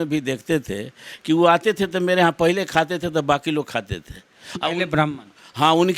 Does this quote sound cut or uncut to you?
uncut